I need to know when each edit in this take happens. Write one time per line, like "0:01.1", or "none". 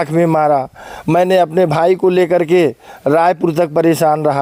none